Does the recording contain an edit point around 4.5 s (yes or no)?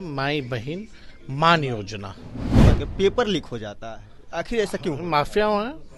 no